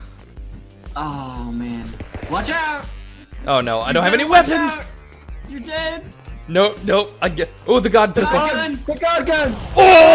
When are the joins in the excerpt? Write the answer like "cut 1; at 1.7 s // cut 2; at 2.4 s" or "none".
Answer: cut 1; at 8.8 s